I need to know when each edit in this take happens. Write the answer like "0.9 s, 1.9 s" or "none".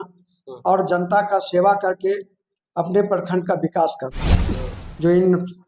4.4 s